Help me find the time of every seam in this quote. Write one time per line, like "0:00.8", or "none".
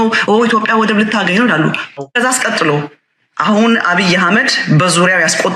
0:01.8